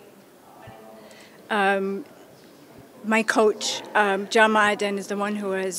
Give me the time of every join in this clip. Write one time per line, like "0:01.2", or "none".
0:04.3

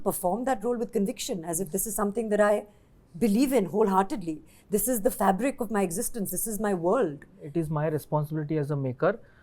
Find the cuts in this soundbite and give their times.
0:07.4

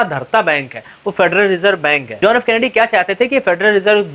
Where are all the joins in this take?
0:02.1

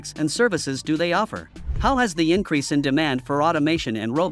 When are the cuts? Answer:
0:01.6

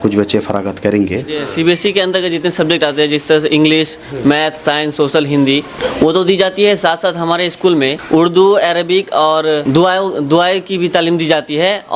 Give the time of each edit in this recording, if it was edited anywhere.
0:01.5
0:05.8
0:08.0
0:09.6

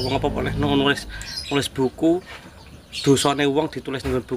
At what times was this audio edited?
none

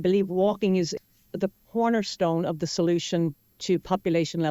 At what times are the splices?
0:00.9

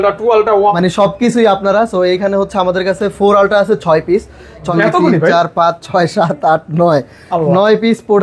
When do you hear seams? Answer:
0:00.7
0:04.7

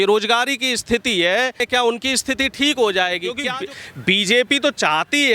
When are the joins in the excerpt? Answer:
0:01.6
0:03.5

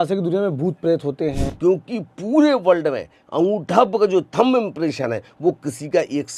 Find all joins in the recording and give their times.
0:01.5

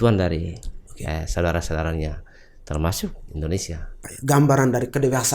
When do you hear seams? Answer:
0:04.1

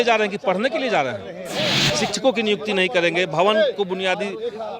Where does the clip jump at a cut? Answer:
0:01.8

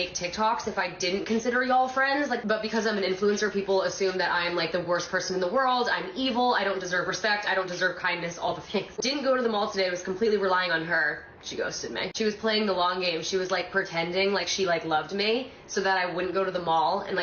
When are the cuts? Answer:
0:02.4
0:09.0

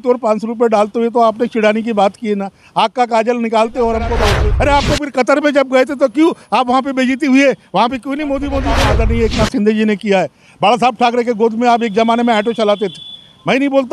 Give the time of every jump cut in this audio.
0:04.4
0:08.7

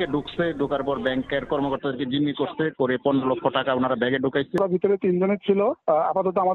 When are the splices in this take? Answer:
0:04.6

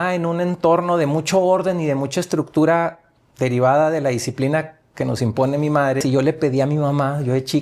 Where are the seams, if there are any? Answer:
0:06.0

